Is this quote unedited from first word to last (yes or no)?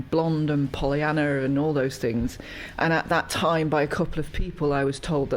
no